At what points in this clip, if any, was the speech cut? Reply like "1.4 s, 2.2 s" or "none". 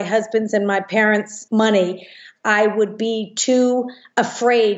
1.4 s